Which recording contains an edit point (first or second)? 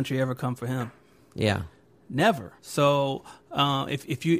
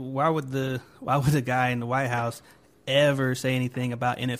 first